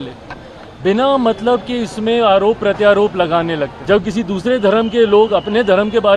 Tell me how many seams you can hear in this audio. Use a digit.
1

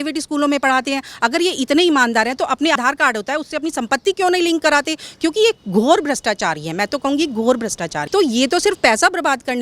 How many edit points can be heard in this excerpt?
2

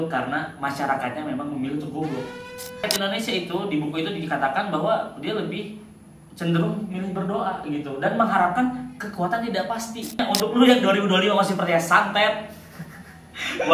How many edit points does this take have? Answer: 2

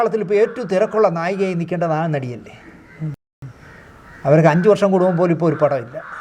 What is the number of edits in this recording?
0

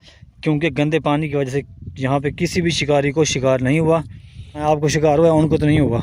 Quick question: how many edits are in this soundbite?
1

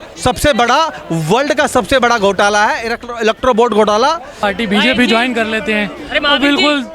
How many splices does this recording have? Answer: 1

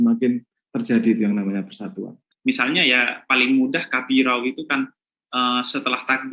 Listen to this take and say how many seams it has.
1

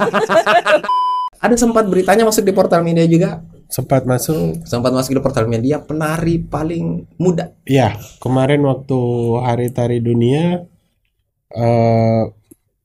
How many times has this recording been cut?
1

